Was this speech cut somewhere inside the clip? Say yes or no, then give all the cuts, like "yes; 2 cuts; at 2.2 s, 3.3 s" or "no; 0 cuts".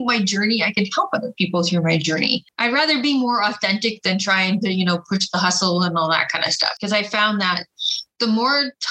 yes; 2 cuts; at 2.5 s, 6.8 s